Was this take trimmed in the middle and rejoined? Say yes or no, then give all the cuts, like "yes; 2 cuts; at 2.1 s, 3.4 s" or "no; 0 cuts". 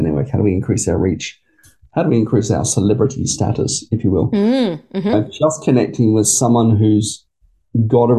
no; 0 cuts